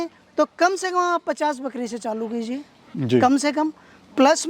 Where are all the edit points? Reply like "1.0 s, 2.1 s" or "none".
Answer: none